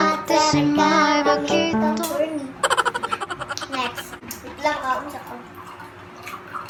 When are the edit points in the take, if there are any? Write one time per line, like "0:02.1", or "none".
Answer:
none